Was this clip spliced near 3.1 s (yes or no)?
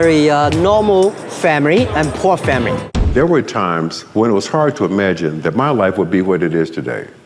yes